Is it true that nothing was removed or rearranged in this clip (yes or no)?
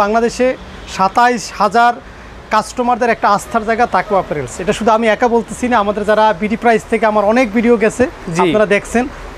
yes